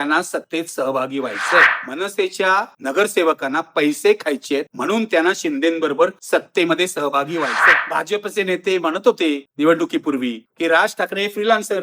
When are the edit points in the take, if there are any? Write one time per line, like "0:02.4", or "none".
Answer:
0:01.7
0:07.8